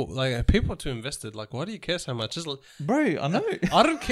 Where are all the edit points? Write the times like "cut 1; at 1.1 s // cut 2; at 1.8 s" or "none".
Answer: none